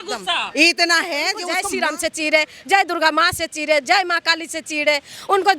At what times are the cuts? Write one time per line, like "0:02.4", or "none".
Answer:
0:01.5